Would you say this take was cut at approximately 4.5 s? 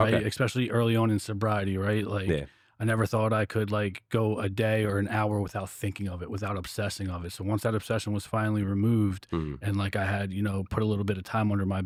no; 0 cuts

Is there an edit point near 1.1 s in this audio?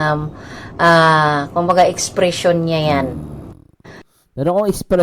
no; 1 cut; at 3.2 s

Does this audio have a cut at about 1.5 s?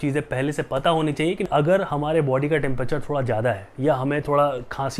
yes; 1 cut; at 1.5 s

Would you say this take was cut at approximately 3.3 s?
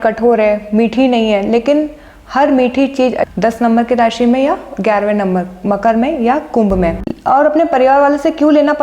yes; 2 cuts; at 3.3 s, 7.1 s

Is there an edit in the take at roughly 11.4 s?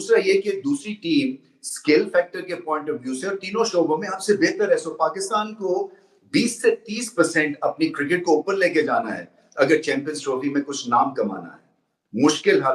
no; 0 cuts

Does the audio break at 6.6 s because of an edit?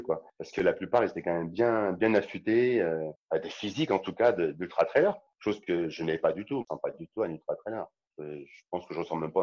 yes; 4 cuts; at 3.1 s, 5.2 s, 6.6 s, 8.0 s

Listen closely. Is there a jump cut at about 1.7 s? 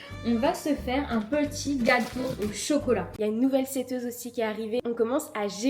no; 2 cuts; at 3.1 s, 4.8 s

